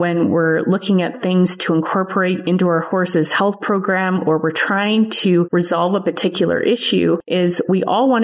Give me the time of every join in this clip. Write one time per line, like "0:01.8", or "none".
0:05.5
0:07.2